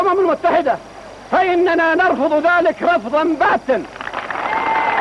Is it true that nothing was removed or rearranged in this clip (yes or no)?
yes